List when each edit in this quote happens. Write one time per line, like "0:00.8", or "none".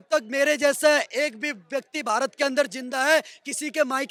none